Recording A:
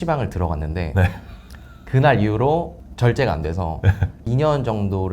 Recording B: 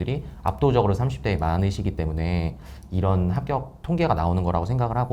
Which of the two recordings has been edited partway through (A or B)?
A